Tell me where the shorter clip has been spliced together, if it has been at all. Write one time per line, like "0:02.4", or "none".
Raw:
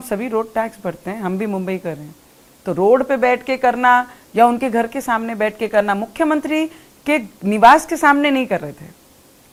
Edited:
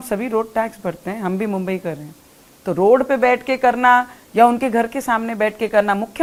none

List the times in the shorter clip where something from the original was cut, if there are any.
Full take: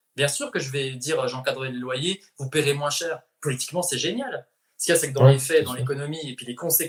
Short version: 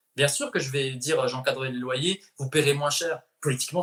none

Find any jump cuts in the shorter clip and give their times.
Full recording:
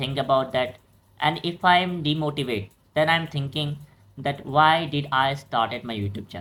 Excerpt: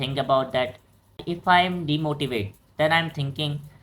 0:01.2

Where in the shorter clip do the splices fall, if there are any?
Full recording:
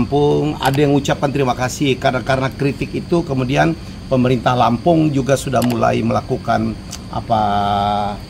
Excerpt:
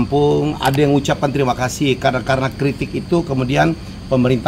none

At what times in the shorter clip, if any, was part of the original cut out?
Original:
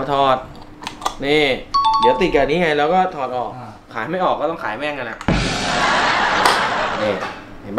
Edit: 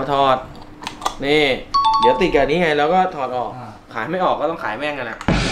none

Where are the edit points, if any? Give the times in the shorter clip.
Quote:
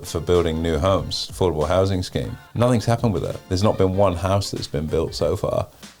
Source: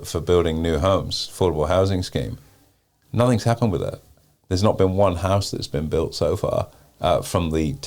0:02.4
0:03.4

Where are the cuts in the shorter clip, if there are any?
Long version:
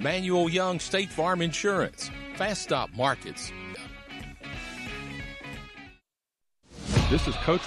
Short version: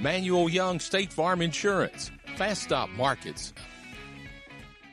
0:03.4

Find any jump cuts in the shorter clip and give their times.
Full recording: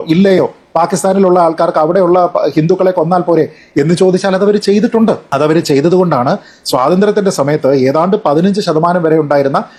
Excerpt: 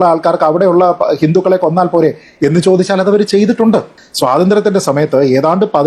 0:03.9

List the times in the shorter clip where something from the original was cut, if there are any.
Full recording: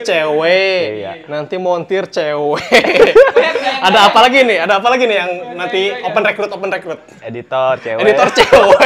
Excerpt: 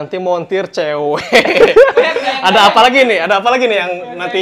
none

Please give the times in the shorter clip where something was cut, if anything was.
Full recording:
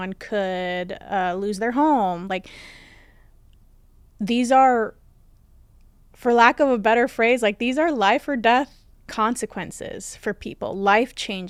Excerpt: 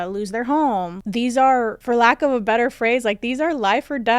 0:00.9
0:01.8

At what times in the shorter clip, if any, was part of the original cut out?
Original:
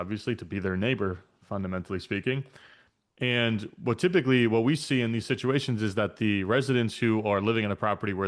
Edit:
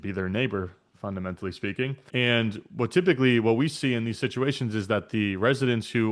0:02.0

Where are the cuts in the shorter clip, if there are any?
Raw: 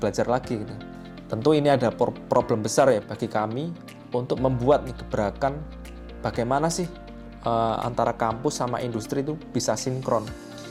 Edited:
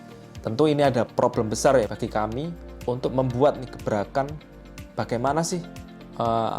0:01.1
0:02.2

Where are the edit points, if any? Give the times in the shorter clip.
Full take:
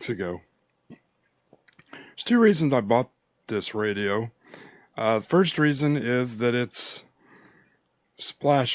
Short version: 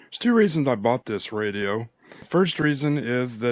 0:01.0
0:02.3

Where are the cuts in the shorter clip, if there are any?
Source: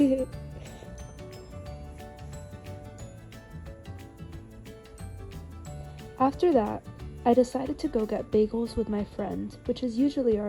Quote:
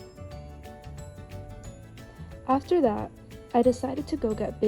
0:02.4

